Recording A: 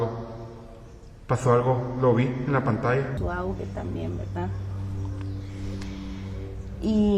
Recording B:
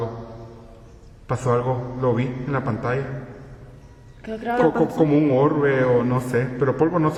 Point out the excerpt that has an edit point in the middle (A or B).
A